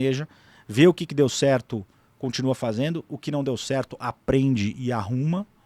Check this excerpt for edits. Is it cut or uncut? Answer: uncut